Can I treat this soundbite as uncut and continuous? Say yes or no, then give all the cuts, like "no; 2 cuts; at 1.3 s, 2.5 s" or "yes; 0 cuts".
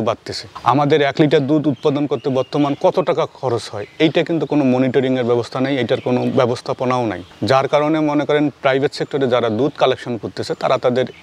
yes; 0 cuts